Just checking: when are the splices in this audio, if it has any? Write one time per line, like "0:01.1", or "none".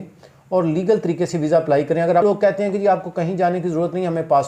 0:02.2